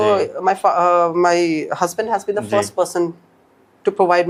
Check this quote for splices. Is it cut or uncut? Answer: uncut